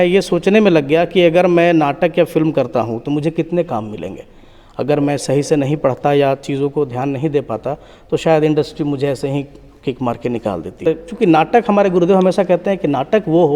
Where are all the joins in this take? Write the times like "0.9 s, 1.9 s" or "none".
10.9 s